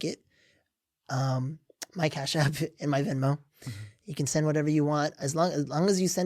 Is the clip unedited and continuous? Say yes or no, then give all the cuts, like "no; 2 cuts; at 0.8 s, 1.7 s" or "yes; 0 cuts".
yes; 0 cuts